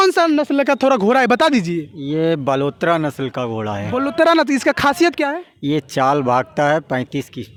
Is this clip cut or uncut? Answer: uncut